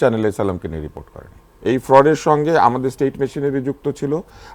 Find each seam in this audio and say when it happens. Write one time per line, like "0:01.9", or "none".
0:01.5